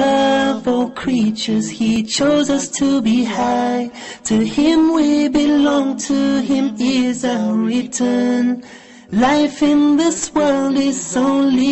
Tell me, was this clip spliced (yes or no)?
yes